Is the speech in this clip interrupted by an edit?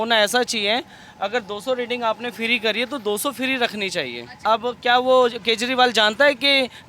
yes; 1 cut; at 4.4 s

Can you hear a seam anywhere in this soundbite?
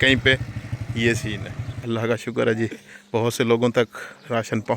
yes; 1 cut; at 1.8 s

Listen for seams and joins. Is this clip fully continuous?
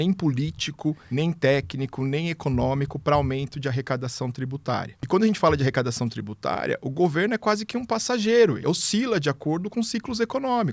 no; 3 cuts; at 1.0 s, 4.9 s, 8.6 s

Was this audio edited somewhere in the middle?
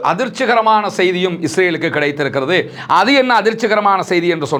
no; 0 cuts

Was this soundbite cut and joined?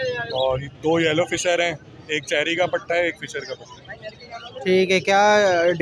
no; 0 cuts

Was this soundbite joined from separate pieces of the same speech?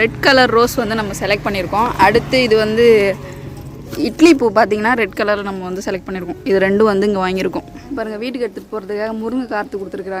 yes; 1 cut; at 7.9 s

